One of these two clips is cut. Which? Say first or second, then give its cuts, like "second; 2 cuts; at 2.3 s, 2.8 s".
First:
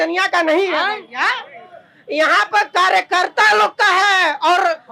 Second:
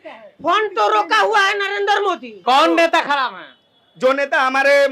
second; 1 cut; at 2.3 s